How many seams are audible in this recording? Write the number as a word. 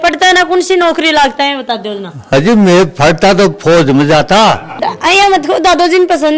one